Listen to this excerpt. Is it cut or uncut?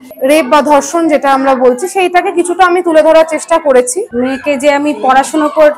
cut